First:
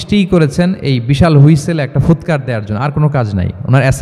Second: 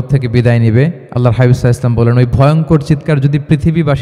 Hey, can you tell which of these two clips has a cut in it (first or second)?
second